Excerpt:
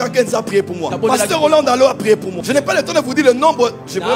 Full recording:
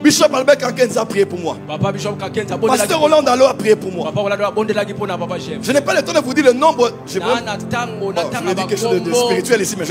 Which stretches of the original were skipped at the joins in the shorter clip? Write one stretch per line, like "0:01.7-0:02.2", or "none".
0:01.5-0:02.5
0:03.9-0:05.5